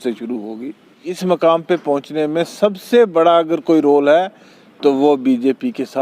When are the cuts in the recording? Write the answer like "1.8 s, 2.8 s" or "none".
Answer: 1.1 s